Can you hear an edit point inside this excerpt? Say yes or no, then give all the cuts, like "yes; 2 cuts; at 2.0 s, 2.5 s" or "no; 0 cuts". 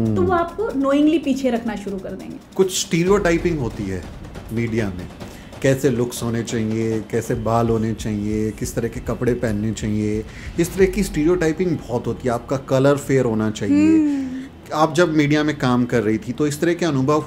yes; 1 cut; at 2.3 s